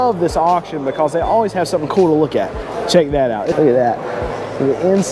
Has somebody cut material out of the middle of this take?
yes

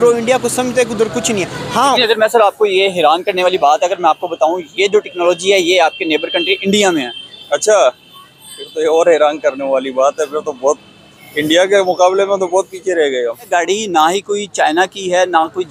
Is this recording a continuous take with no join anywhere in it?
no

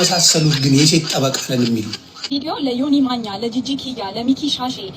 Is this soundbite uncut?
no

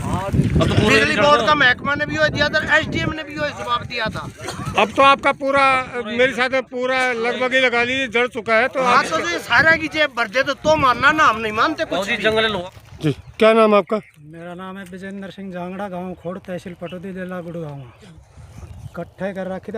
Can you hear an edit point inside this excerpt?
yes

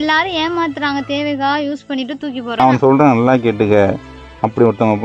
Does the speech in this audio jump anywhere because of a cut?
yes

